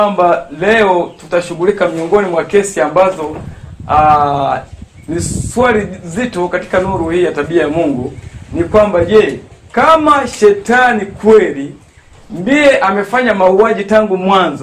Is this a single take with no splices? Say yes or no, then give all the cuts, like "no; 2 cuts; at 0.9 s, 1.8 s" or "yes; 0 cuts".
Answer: yes; 0 cuts